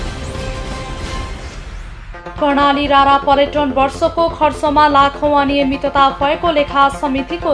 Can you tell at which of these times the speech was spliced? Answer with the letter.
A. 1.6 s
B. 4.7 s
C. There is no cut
A